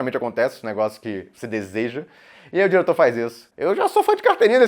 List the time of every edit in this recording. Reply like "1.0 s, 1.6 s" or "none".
3.5 s